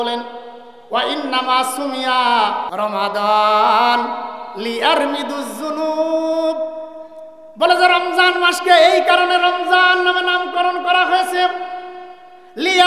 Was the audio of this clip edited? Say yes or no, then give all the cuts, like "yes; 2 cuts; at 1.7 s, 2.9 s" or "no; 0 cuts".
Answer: yes; 1 cut; at 2.7 s